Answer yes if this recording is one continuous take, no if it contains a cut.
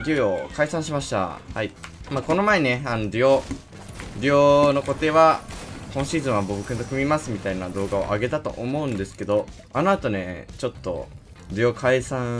yes